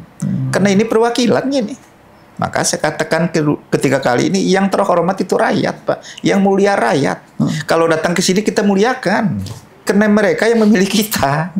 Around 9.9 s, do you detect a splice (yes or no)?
yes